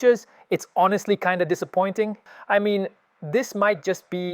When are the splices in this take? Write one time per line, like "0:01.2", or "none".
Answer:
0:02.2

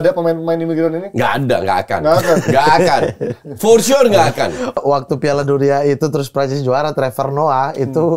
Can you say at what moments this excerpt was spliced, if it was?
0:04.8

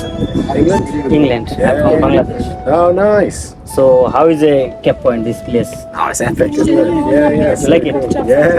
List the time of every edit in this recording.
none

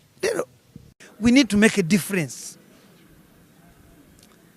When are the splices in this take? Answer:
0:01.0

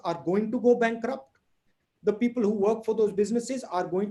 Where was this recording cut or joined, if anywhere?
none

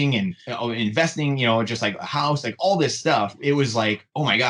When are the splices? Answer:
0:03.4

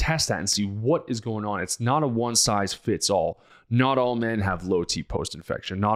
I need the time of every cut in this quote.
none

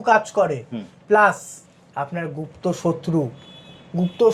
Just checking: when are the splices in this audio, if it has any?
none

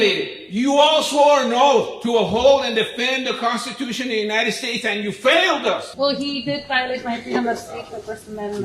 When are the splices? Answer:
0:05.9

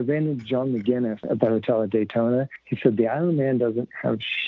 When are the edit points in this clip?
0:01.2
0:02.6

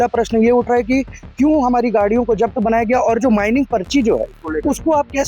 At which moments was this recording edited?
none

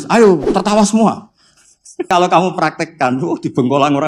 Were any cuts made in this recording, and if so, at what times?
0:02.1

